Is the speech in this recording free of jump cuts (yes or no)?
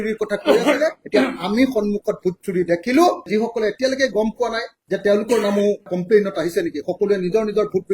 no